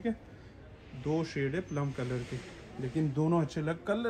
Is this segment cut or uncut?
uncut